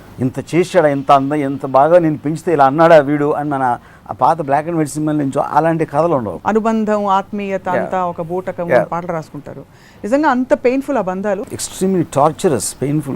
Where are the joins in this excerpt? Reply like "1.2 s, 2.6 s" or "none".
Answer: 6.4 s, 11.5 s

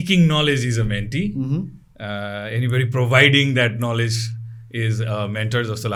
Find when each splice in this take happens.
none

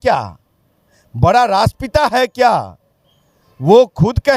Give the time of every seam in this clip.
none

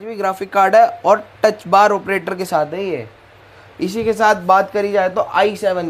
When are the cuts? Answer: none

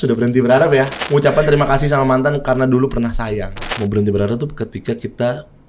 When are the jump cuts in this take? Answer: 1.0 s, 3.6 s

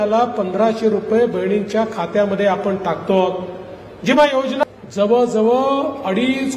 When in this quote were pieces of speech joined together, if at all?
4.6 s

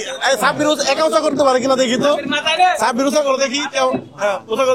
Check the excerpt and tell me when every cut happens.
none

